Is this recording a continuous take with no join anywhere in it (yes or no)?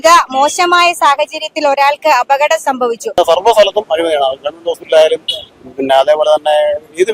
no